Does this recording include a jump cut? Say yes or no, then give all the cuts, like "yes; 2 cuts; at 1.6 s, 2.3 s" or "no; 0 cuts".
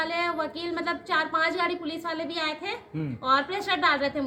no; 0 cuts